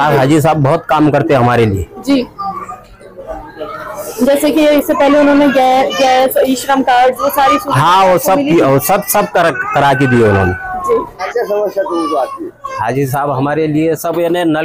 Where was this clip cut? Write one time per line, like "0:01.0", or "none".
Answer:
none